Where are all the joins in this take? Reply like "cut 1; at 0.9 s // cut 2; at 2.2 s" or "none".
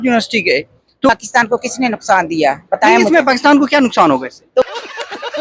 cut 1; at 1.1 s // cut 2; at 4.6 s